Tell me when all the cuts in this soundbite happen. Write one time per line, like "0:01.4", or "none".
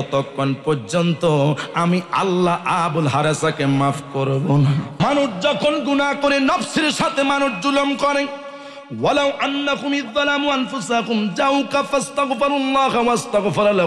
0:05.0